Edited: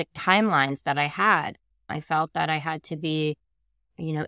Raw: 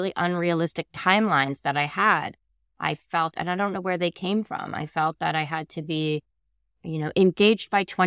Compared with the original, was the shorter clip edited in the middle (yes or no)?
yes